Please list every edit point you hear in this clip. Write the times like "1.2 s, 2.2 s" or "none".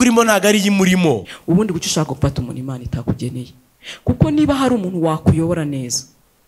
1.3 s